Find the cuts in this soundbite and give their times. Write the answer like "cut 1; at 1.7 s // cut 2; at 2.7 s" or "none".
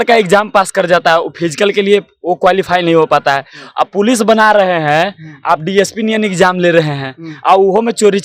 none